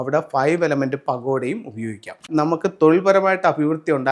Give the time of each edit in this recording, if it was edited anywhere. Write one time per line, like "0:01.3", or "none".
0:02.2